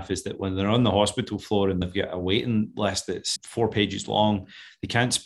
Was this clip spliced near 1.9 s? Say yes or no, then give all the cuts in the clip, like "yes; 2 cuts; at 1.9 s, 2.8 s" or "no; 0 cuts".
yes; 1 cut; at 1.9 s